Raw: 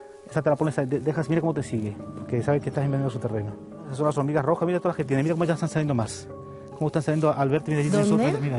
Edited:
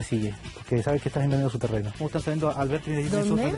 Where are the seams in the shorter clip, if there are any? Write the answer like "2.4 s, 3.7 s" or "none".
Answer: 1.9 s